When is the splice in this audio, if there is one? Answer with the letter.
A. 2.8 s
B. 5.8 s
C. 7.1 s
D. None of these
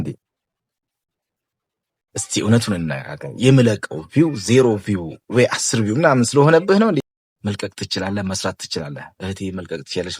C